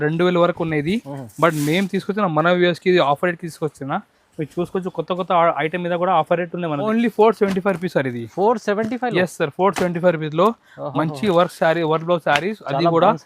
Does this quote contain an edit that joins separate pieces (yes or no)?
yes